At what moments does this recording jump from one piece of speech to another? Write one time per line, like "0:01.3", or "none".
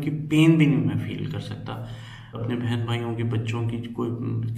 0:02.4